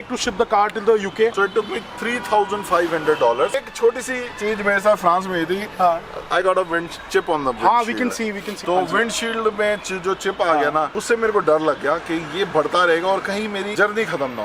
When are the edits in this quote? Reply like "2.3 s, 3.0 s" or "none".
1.3 s, 3.6 s, 13.7 s